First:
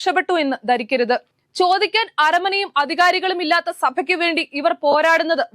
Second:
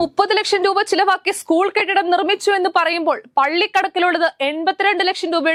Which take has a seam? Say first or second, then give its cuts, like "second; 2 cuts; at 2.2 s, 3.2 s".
first; 1 cut; at 1.3 s